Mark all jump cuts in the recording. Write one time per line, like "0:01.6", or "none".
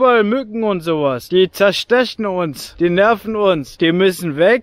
0:01.2
0:02.6
0:03.7